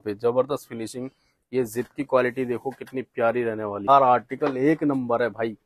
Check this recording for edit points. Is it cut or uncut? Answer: cut